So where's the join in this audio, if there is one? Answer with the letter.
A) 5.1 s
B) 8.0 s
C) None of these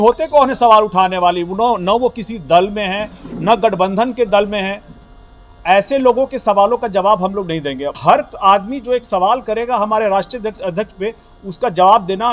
B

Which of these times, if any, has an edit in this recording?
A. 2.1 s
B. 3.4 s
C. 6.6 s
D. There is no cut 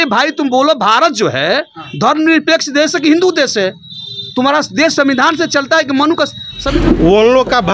C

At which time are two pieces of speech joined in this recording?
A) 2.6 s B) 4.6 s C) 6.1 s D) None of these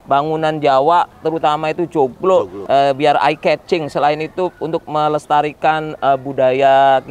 A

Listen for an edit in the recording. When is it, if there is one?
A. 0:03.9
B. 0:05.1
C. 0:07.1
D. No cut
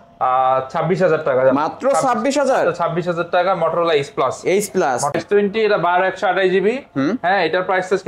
B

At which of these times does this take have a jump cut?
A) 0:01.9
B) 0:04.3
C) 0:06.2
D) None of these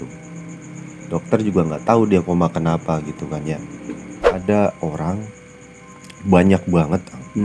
B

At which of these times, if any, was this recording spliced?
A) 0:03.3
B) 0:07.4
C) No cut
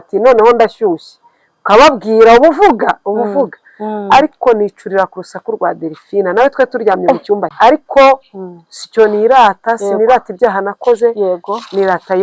B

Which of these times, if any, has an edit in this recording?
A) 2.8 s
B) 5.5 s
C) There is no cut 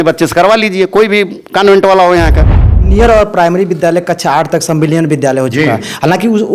A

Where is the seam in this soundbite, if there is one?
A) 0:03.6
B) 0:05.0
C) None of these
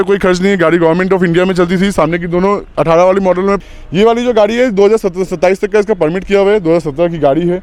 A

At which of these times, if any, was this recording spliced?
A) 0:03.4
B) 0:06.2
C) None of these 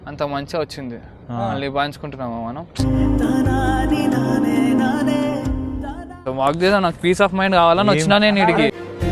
B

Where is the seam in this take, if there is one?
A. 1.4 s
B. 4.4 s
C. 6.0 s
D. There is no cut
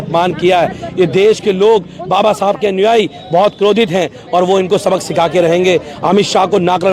D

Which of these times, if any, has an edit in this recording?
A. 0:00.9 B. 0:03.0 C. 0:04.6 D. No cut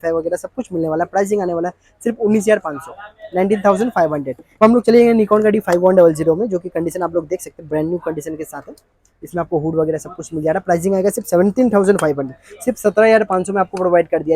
C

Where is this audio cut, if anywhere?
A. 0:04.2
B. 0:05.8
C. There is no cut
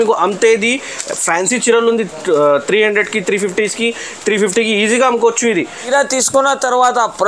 B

